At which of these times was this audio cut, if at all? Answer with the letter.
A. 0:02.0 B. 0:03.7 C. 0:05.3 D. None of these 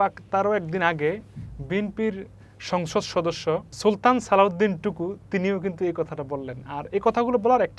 B